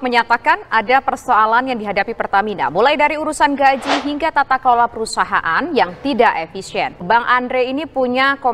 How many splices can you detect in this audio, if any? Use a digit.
0